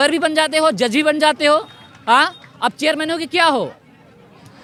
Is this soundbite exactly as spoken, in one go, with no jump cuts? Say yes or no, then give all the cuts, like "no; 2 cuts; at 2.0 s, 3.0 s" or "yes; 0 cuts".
yes; 0 cuts